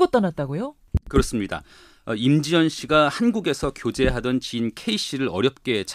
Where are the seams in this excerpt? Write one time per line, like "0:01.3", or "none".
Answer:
0:04.5